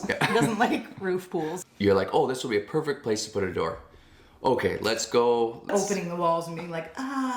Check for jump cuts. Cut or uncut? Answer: cut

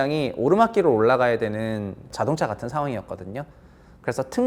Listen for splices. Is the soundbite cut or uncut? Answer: uncut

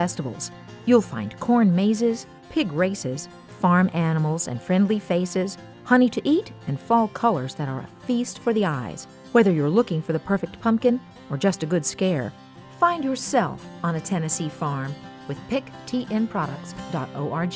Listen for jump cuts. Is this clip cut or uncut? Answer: uncut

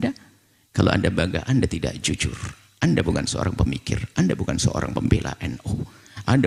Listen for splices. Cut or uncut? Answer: uncut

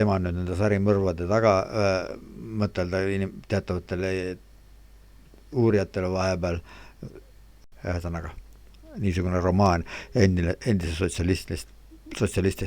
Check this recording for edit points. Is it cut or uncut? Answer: cut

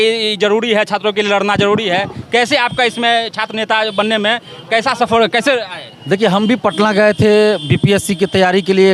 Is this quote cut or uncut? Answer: uncut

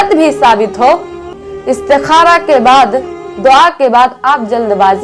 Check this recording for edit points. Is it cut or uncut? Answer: cut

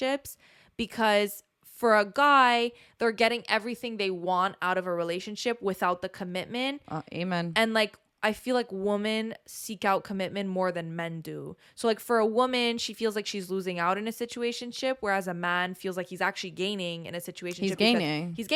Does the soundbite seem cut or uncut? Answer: uncut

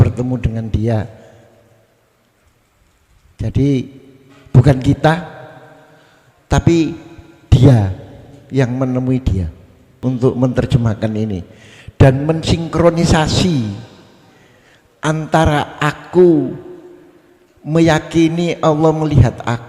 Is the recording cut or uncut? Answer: cut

